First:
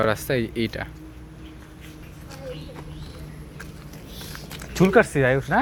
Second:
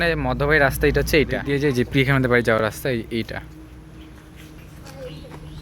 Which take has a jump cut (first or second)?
second